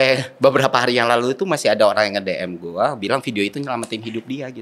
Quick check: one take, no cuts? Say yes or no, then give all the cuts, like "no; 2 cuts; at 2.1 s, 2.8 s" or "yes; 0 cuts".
yes; 0 cuts